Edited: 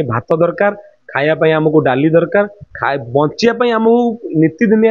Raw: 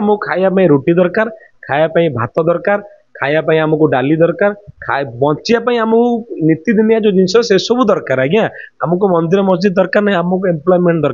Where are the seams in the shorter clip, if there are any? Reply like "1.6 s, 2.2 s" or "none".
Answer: none

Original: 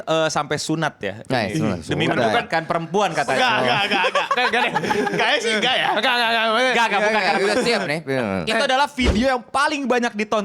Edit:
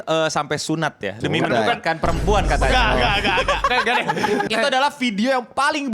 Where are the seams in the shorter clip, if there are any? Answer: 1.2 s, 4.5 s

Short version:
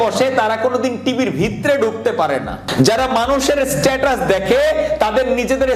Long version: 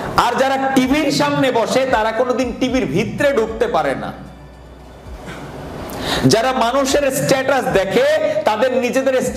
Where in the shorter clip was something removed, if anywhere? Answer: 2.6 s

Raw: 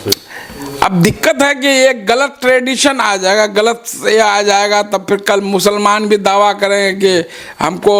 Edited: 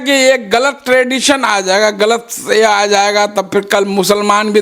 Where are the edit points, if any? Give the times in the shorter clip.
none

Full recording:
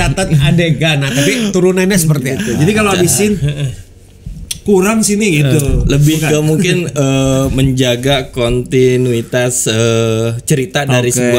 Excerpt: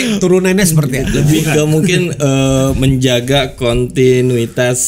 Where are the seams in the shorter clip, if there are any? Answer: 1.1 s

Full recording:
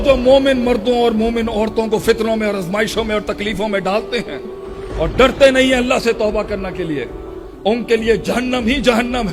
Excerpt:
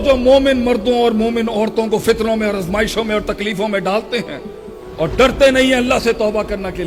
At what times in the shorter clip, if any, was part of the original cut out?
none

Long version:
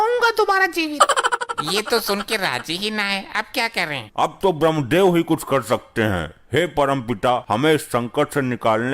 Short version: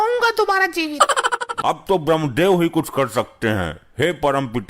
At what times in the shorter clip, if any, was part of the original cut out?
1.5 s

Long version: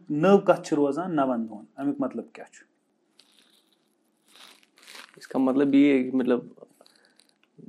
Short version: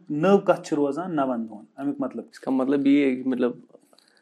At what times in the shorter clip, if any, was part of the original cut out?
2.3 s

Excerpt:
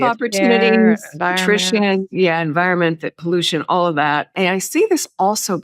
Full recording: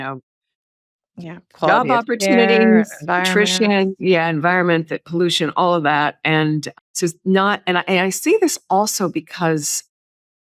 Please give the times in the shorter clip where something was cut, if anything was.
4.3 s

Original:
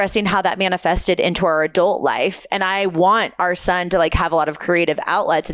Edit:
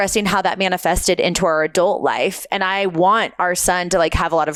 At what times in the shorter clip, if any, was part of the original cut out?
none

